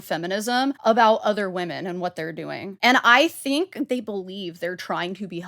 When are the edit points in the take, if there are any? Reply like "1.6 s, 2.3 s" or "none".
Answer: 0.8 s, 2.7 s, 3.9 s